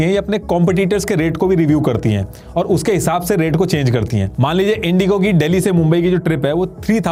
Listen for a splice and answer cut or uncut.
uncut